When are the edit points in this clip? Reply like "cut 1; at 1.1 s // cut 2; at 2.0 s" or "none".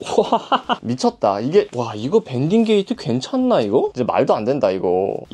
cut 1; at 3.9 s